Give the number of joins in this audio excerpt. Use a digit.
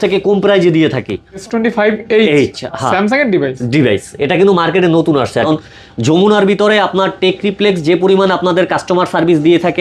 2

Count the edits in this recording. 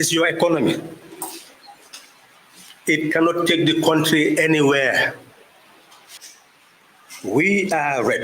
1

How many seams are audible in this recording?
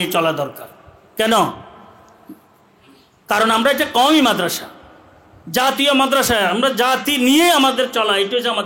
0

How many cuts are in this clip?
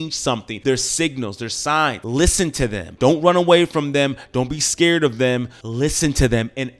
0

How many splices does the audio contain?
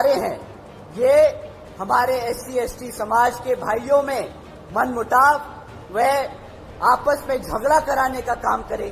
0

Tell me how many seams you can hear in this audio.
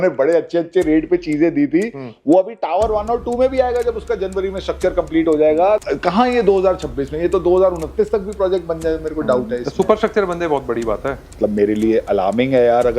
2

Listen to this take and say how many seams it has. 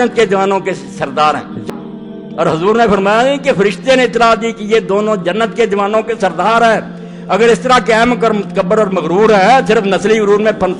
1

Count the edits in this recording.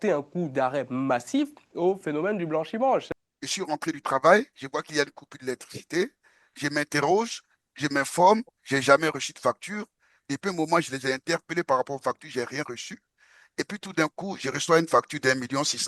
1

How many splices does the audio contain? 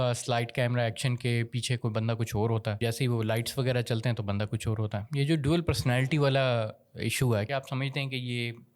2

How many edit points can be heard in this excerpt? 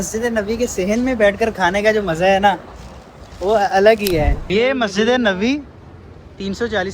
1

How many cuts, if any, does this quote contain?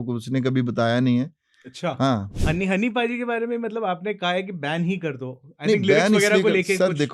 1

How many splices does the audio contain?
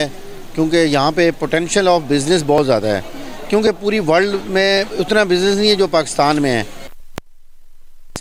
0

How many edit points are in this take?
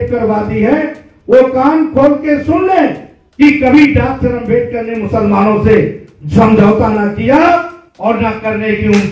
0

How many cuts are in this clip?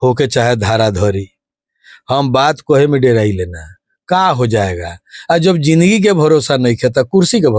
0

